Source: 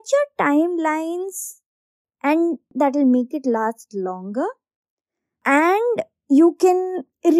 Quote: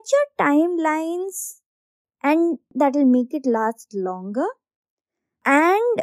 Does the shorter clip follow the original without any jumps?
yes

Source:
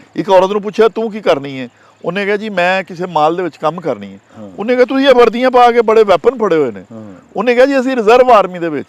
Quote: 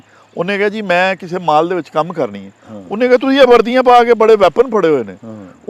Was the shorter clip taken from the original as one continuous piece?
yes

